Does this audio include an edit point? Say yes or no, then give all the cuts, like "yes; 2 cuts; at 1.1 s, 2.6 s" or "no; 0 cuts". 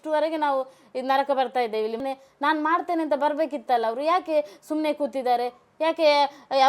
yes; 1 cut; at 2.0 s